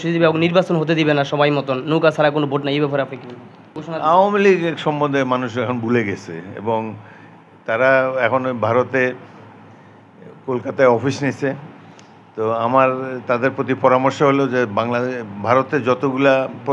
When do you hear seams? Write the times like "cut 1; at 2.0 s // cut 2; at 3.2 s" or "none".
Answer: cut 1; at 3.8 s